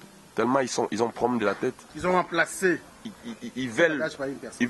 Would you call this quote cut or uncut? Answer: uncut